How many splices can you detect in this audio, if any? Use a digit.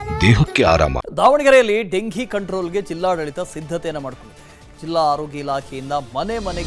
1